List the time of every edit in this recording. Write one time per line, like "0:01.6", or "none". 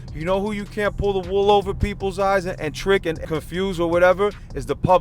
0:03.2